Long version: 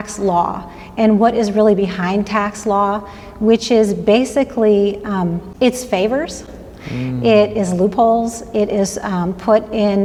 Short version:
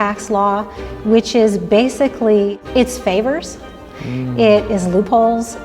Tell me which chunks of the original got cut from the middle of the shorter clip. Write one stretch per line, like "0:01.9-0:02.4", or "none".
0:05.0-0:05.5